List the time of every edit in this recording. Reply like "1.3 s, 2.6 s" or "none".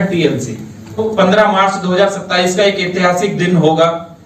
1.0 s